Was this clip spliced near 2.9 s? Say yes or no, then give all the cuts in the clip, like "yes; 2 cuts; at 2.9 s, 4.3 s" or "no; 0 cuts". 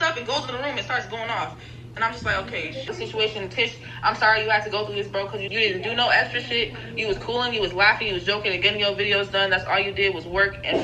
yes; 2 cuts; at 2.9 s, 5.4 s